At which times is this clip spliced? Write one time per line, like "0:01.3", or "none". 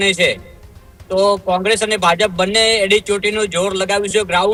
none